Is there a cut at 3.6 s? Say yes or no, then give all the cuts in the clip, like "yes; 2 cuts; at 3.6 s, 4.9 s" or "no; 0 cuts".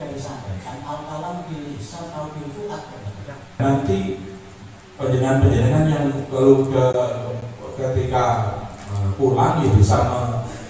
yes; 1 cut; at 3.6 s